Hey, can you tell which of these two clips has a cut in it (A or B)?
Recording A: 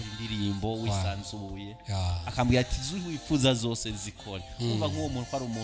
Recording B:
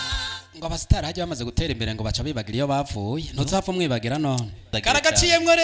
B